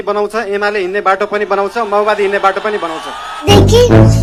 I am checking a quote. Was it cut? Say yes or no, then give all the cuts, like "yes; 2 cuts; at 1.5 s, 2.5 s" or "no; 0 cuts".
no; 0 cuts